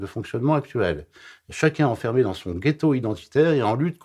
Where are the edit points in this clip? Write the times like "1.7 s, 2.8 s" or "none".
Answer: none